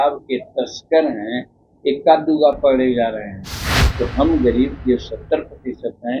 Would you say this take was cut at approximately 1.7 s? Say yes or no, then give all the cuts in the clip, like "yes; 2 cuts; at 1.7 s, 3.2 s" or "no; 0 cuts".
no; 1 cut; at 3.8 s